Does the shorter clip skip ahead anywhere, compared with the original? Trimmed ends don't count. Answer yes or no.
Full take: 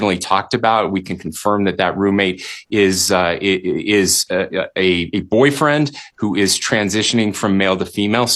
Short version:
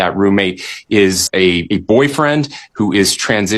yes